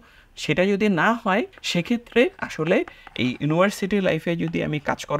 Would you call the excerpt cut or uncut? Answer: cut